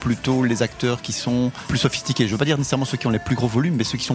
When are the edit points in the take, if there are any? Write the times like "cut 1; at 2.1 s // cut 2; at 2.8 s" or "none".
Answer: cut 1; at 1.6 s